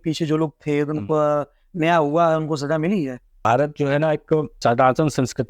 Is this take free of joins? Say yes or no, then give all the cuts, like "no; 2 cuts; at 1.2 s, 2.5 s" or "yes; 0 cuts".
no; 2 cuts; at 3.5 s, 4.5 s